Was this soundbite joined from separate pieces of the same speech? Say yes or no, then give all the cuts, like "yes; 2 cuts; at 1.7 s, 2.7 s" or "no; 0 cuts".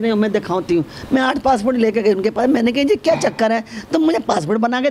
no; 0 cuts